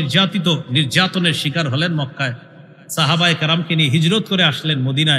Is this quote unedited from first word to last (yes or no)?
yes